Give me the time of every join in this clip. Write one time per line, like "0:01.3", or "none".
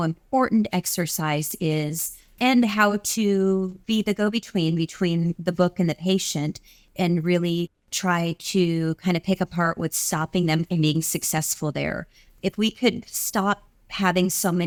none